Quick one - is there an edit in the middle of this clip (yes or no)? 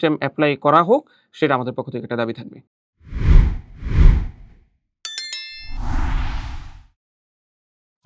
no